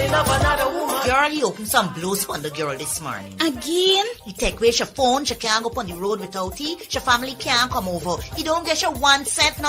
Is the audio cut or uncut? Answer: cut